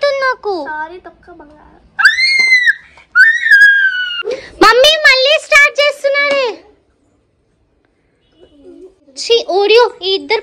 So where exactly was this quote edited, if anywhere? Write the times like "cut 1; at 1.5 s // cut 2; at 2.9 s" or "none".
cut 1; at 4.3 s // cut 2; at 9.1 s